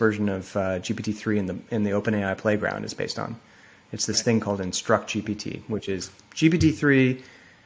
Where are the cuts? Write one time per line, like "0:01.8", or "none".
none